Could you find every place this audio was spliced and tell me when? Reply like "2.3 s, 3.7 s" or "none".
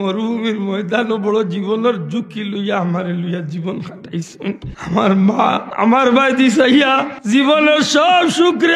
4.7 s, 5.7 s, 7.1 s